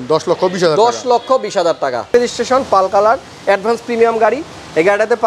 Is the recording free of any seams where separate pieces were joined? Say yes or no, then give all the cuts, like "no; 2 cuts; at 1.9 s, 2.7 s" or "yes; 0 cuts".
no; 1 cut; at 2.1 s